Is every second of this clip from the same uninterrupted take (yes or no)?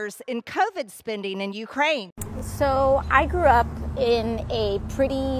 yes